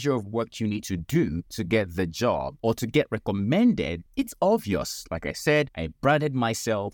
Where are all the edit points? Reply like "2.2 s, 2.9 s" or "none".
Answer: 1.5 s, 2.5 s, 4.0 s, 5.8 s